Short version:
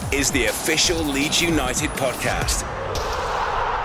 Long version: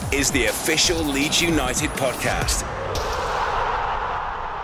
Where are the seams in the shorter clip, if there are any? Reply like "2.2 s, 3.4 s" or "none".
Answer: none